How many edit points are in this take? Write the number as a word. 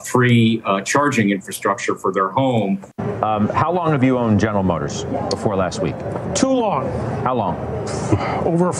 one